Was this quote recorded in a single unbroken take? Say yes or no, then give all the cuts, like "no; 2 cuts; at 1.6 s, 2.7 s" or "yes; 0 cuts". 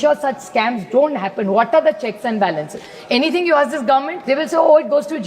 no; 1 cut; at 4.1 s